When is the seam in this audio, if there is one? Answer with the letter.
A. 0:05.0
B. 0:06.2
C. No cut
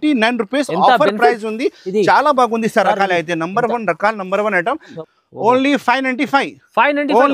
A